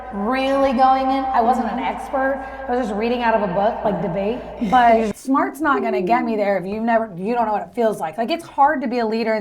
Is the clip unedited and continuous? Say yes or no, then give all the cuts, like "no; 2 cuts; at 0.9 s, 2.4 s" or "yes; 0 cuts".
no; 1 cut; at 4.5 s